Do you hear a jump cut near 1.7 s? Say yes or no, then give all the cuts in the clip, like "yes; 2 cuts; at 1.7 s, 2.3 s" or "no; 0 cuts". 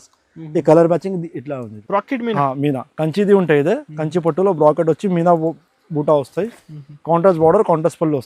yes; 1 cut; at 1.7 s